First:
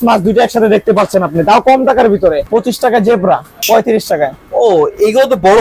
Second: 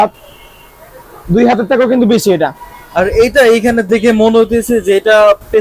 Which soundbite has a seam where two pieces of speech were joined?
first; 2 cuts; at 2.5 s, 3.6 s

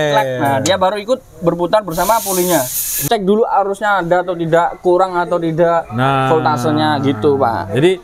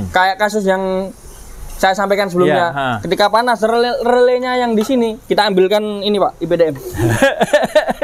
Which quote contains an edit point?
first; 1 cut; at 3.0 s

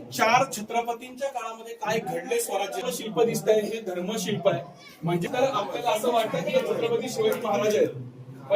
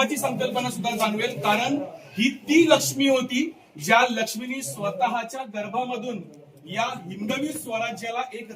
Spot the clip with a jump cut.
first; 2 cuts; at 2.8 s, 5.2 s

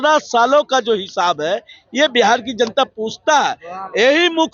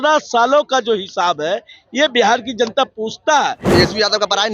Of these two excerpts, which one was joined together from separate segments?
second; 1 cut; at 3.6 s

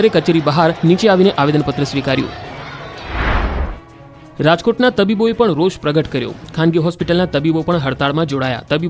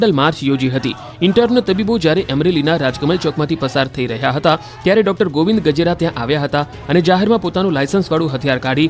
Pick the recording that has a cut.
second; 1 cut; at 6.0 s

